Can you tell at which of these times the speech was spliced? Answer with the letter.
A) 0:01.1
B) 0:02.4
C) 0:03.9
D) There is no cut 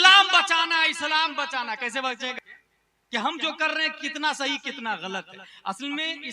B